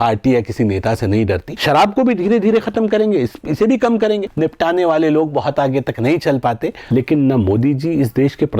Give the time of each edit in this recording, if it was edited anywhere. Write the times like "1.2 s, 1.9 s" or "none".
1.5 s, 4.3 s, 6.8 s